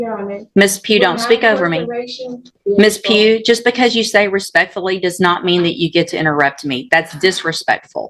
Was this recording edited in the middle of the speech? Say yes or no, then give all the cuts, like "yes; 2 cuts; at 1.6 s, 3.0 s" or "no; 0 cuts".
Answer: yes; 1 cut; at 2.5 s